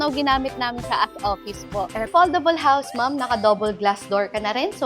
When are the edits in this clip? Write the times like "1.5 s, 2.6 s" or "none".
2.1 s